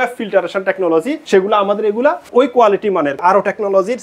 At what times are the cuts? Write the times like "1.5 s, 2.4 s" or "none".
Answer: 1.2 s, 2.3 s, 3.2 s